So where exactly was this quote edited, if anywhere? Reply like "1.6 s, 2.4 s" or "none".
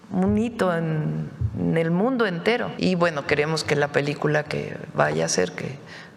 2.7 s